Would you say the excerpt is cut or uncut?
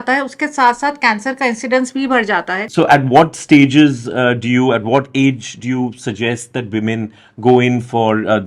cut